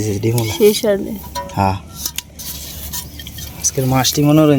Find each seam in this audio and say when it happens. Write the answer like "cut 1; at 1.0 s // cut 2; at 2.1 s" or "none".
none